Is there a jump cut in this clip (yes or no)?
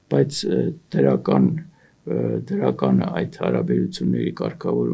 no